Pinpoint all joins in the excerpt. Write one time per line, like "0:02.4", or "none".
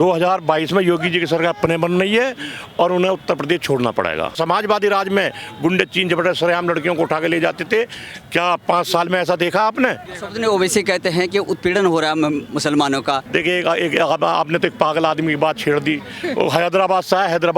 0:04.3
0:10.1
0:13.2